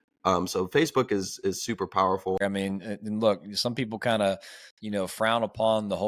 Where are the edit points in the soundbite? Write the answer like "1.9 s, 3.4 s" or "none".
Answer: 2.4 s